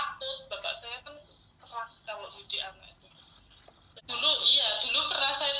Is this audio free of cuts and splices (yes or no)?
no